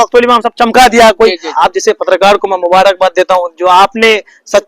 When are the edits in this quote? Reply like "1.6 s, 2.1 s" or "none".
1.5 s